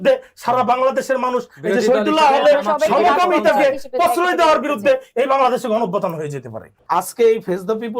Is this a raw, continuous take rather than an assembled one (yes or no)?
no